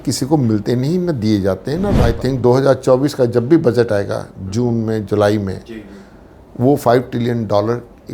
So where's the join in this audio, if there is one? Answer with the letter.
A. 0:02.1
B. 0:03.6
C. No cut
A